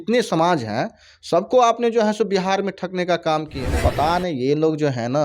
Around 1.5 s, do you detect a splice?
no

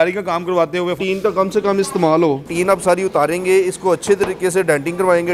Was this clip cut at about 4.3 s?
no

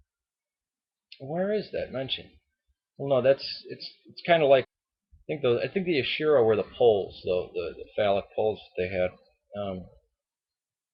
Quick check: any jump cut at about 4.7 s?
no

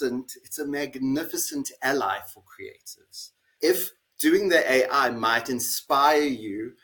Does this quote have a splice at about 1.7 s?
no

